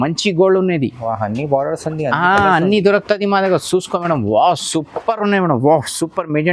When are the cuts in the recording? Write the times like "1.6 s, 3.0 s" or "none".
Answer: none